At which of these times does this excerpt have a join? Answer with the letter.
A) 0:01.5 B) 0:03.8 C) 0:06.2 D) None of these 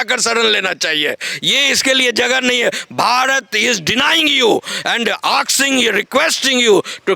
D